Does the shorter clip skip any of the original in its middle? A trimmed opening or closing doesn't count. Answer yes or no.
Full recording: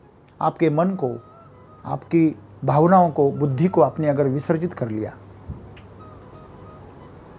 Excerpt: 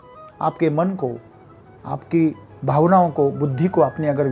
no